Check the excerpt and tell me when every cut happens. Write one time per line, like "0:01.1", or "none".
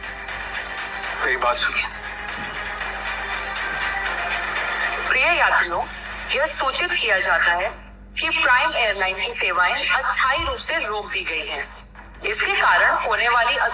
0:02.8